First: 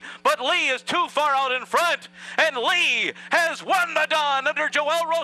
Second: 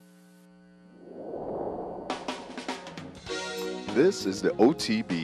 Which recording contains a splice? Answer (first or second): second